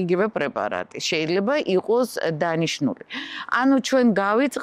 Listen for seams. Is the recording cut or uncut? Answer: uncut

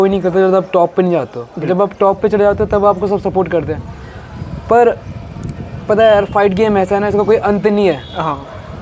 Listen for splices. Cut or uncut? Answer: uncut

